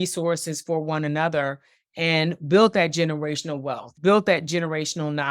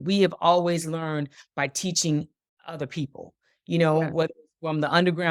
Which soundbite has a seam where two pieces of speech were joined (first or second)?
first